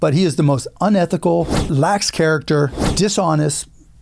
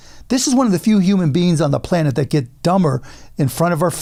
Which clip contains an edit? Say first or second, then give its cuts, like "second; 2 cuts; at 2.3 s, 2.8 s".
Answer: first; 2 cuts; at 1.6 s, 2.8 s